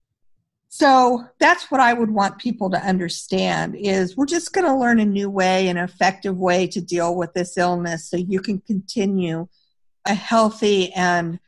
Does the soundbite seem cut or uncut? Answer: cut